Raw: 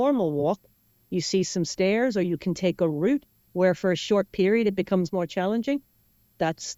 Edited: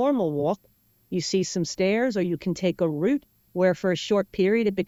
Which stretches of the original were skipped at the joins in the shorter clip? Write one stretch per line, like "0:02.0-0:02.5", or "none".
none